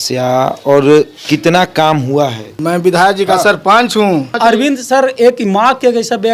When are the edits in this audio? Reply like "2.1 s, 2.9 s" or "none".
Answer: 2.6 s, 4.3 s